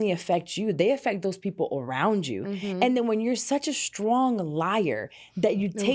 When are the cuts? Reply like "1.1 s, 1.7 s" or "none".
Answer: none